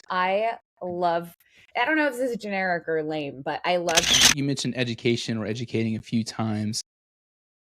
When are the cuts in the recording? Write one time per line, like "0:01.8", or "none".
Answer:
0:04.1

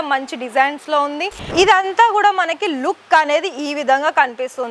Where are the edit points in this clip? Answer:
0:01.4

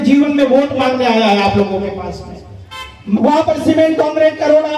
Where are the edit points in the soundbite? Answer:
0:03.2

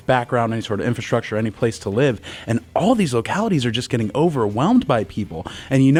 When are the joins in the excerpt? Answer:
none

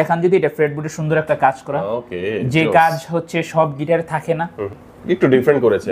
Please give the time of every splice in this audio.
0:04.8

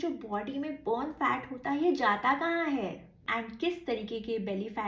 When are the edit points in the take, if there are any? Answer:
0:03.2

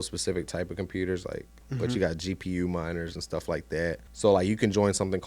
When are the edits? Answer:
0:01.6
0:04.0

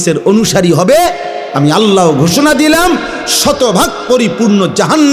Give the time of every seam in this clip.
none

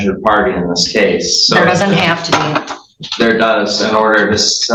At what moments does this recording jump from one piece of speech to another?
none

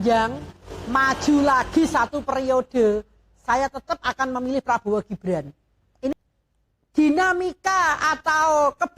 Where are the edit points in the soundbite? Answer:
0:06.1

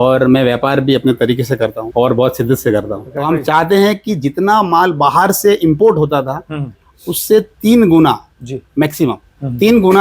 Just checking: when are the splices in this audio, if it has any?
0:01.8
0:03.1

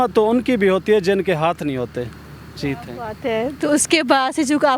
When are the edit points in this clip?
none

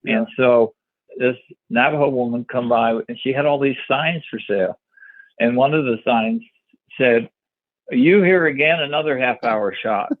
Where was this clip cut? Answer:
0:01.0

